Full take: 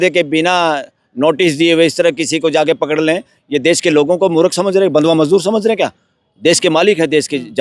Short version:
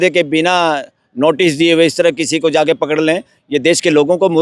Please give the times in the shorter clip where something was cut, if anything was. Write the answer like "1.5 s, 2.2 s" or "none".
none